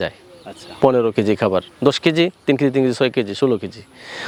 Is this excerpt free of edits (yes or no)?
yes